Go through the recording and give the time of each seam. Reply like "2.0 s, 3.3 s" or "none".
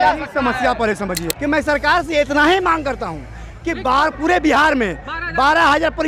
1.3 s